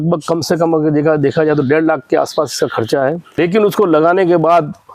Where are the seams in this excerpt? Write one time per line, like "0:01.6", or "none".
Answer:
0:03.3